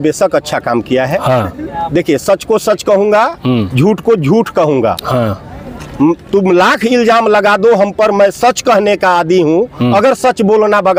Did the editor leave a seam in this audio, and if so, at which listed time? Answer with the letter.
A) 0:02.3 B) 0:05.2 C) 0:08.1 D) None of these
D